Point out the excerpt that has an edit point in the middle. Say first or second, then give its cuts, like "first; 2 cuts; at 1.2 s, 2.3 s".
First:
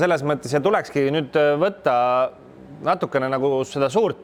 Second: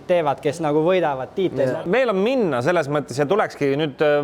second; 1 cut; at 1.7 s